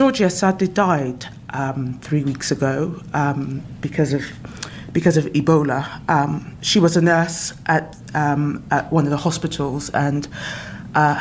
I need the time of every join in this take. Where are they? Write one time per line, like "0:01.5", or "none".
none